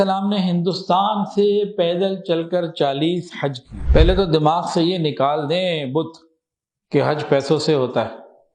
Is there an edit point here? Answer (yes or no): yes